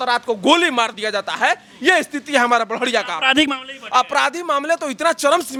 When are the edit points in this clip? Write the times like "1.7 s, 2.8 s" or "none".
none